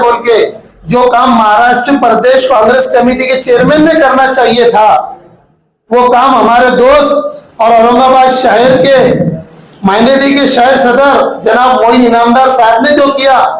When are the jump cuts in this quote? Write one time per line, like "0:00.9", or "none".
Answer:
none